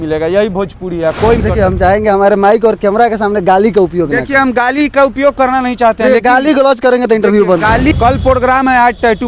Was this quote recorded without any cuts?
no; 2 cuts; at 1.4 s, 7.9 s

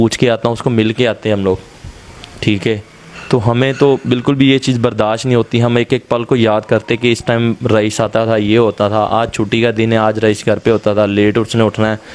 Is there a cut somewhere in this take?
no; 0 cuts

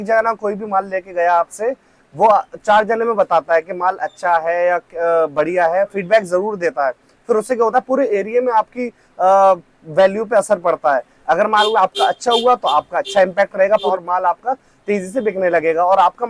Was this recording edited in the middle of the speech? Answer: no; 0 cuts

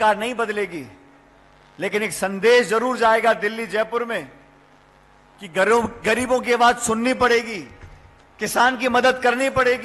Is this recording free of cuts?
yes; 0 cuts

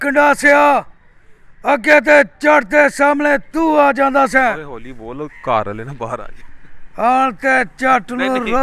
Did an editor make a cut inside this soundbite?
no; 0 cuts

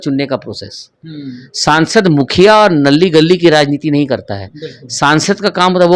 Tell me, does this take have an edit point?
no; 0 cuts

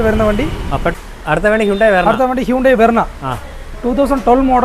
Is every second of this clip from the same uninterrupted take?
no; 1 cut; at 0.9 s

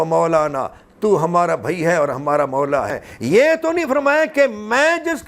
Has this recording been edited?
yes; 1 cut; at 3.1 s

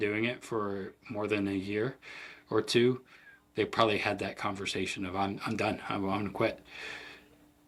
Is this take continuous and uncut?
yes; 0 cuts

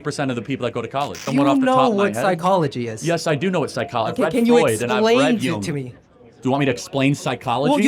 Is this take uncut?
no; 1 cut; at 1.2 s

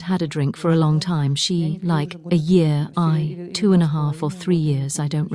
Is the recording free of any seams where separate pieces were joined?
no; 1 cut; at 2.9 s

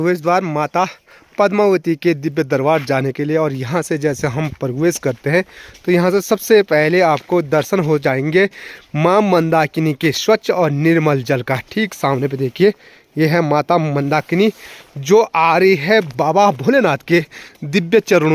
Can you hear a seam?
no; 0 cuts

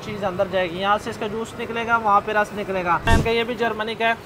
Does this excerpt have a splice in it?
yes; 1 cut; at 3.1 s

